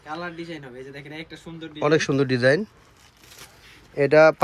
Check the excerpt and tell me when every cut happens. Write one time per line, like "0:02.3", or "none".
none

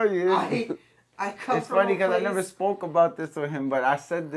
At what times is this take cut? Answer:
none

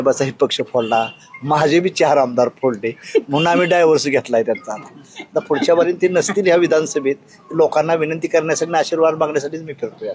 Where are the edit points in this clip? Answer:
none

